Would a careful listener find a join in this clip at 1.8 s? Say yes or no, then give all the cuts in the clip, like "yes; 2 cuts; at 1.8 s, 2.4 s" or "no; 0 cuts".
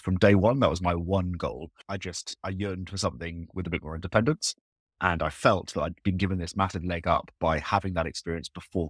yes; 1 cut; at 1.8 s